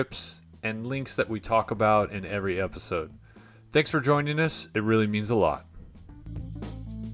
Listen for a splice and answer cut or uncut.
cut